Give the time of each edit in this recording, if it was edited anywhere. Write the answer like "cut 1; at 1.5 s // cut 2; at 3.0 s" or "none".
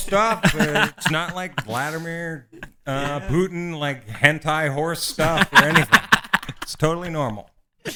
none